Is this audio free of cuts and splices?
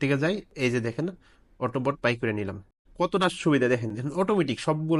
no; 1 cut; at 2.8 s

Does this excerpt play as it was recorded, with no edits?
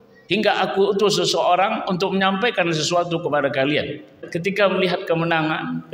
no; 1 cut; at 4.3 s

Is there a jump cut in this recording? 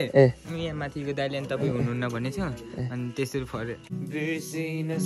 yes; 1 cut; at 3.9 s

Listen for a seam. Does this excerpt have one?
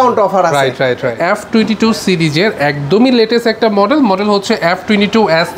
yes; 1 cut; at 1.2 s

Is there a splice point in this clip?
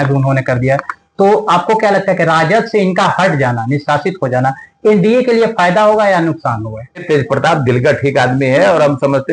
yes; 1 cut; at 7.0 s

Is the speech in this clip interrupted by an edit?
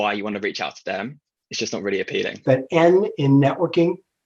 yes; 1 cut; at 2.3 s

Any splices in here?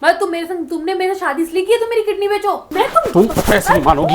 yes; 1 cut; at 2.7 s

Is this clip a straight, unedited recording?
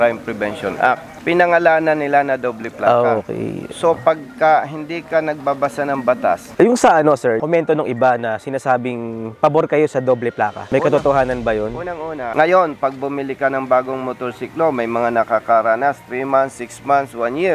no; 3 cuts; at 1.1 s, 6.5 s, 12.3 s

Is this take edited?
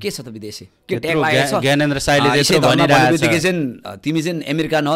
yes; 1 cut; at 3.9 s

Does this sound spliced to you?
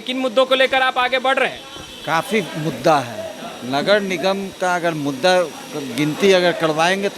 no; 0 cuts

